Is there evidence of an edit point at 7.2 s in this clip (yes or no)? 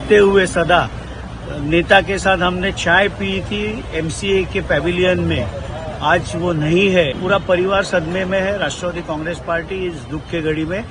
yes